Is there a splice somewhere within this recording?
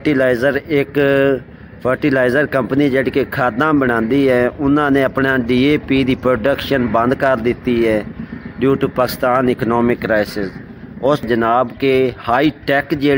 yes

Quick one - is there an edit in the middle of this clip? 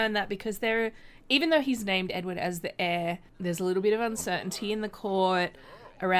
yes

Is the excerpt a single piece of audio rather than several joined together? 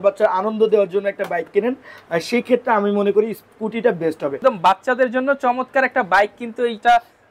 no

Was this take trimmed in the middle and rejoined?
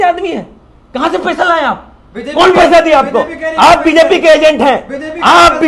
no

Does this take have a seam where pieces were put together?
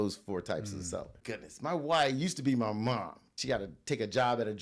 yes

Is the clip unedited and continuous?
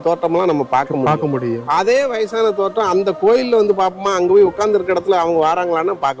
yes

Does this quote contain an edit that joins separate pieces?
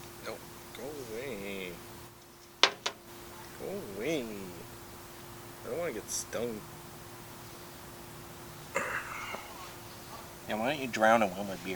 no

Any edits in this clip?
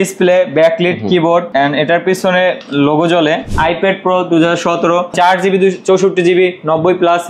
yes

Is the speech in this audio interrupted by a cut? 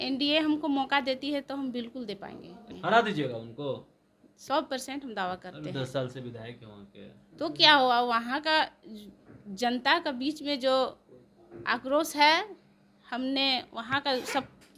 yes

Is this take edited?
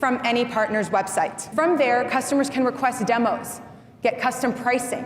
yes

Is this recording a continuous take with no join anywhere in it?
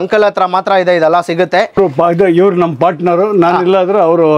no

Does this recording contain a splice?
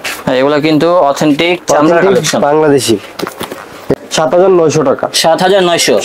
yes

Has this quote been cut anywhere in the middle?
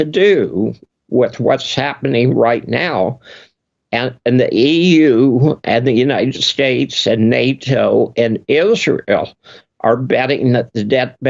no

